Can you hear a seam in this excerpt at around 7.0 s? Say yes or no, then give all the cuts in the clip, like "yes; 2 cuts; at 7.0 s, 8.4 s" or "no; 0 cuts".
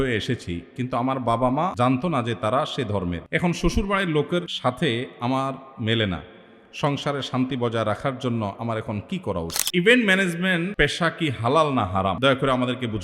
no; 6 cuts; at 1.7 s, 3.2 s, 4.5 s, 9.5 s, 10.7 s, 12.2 s